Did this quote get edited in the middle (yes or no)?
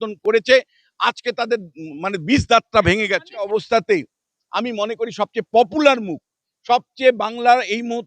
yes